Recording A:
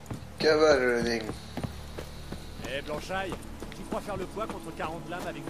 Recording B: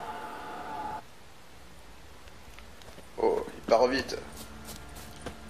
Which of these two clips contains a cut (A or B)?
B